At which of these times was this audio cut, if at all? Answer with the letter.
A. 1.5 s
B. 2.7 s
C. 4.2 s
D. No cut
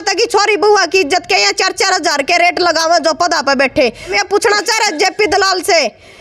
C